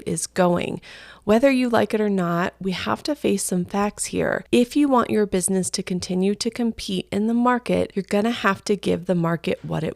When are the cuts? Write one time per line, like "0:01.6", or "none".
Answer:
0:04.4
0:08.0